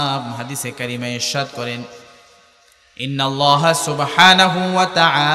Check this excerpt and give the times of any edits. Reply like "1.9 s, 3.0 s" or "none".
none